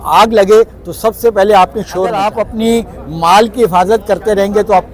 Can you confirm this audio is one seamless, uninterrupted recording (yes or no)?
no